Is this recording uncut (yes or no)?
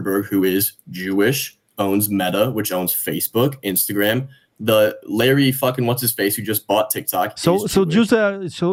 yes